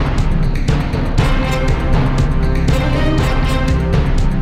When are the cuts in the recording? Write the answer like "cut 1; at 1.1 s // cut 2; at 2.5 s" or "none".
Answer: none